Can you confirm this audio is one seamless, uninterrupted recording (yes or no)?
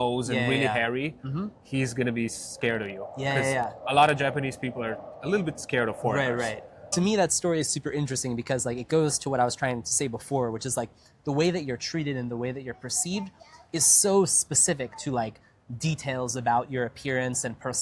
no